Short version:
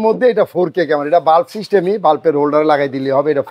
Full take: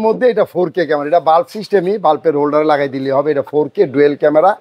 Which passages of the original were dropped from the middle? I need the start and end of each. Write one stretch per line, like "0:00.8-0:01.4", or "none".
none

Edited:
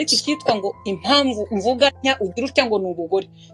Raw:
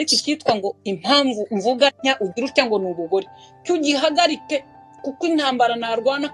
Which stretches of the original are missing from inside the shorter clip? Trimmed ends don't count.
none

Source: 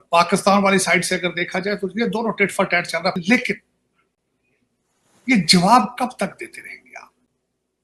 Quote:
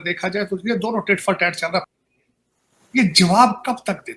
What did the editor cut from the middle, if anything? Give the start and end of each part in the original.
0:03.1-0:04.2

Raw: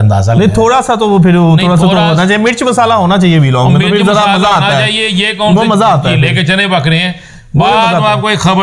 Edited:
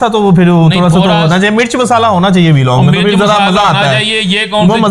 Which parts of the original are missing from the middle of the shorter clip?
none

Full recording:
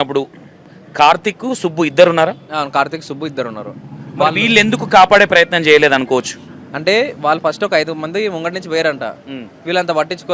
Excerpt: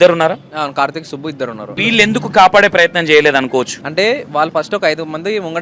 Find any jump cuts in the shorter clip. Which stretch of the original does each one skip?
0:03.7-0:04.3
0:06.4-0:06.7

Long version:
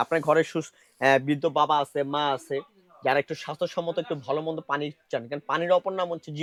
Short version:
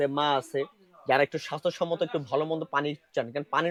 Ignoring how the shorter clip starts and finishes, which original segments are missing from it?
none

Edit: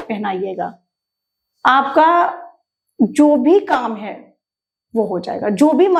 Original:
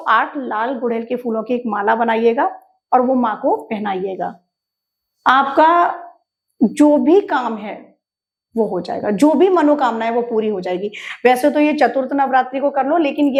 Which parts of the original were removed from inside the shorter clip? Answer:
none

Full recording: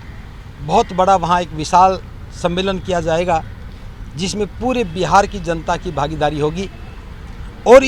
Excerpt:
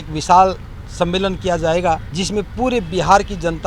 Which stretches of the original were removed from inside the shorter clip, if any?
0:03.6-0:04.2

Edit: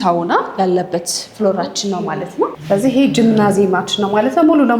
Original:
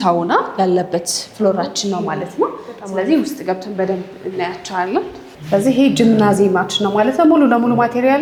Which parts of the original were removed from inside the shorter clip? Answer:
0:02.6-0:05.4

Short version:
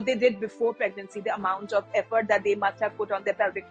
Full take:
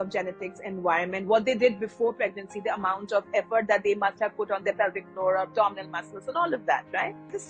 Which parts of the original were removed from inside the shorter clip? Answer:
none

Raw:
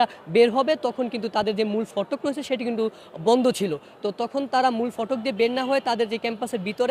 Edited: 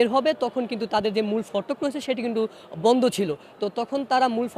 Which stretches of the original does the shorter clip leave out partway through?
none

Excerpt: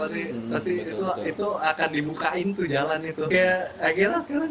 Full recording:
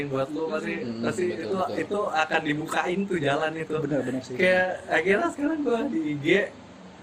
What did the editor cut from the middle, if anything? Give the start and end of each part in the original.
0:03.8-0:04.4

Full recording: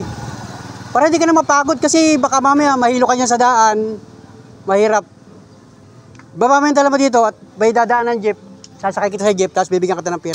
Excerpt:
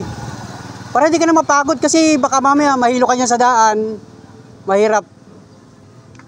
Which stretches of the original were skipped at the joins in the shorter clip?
none

